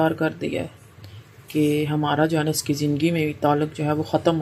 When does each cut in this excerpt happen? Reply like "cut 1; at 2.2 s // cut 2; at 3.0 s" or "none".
none